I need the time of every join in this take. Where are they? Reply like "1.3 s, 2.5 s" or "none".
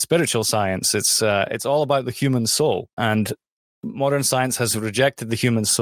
2.9 s